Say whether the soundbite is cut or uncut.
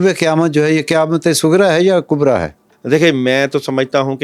uncut